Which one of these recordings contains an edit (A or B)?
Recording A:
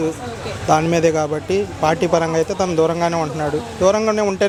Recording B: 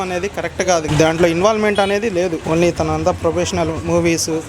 B